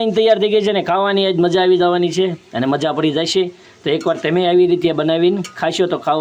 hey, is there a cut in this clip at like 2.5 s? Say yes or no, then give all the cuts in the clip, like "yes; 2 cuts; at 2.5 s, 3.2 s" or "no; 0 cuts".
no; 0 cuts